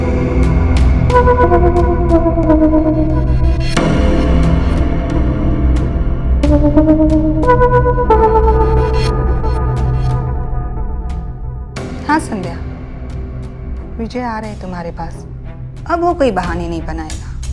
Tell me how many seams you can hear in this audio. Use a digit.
0